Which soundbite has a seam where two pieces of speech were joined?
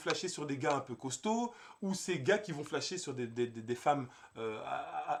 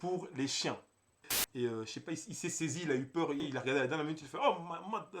second; 2 cuts; at 1.4 s, 3.5 s

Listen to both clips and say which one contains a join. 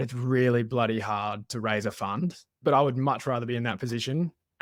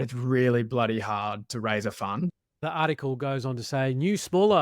second; 1 cut; at 2.6 s

